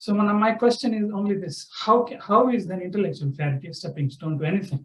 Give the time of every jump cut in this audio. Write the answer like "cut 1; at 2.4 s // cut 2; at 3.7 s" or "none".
none

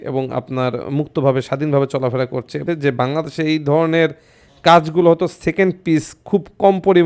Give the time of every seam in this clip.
cut 1; at 2.6 s

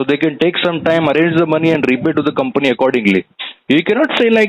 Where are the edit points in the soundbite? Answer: none

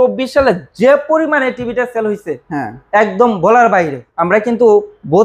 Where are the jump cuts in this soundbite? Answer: cut 1; at 4.1 s

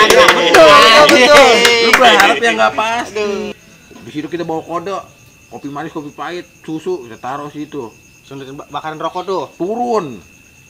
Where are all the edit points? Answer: cut 1; at 3.5 s

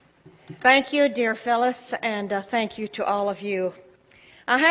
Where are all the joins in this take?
cut 1; at 1.1 s

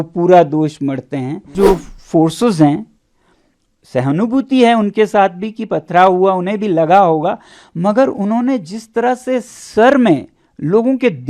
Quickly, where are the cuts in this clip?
cut 1; at 1.5 s

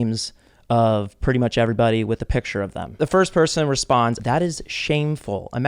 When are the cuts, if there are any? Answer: cut 1; at 2.8 s // cut 2; at 4.2 s

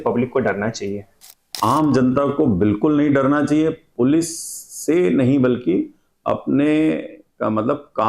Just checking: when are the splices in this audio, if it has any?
cut 1; at 1.4 s

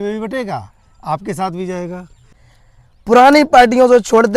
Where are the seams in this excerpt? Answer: cut 1; at 2.2 s

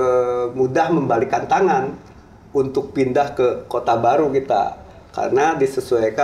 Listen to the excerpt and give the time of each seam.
none

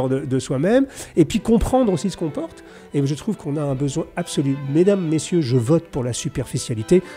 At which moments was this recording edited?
none

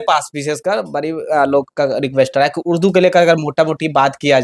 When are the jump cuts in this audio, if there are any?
none

